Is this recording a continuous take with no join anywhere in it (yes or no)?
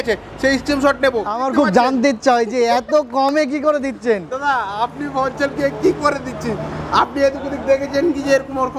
no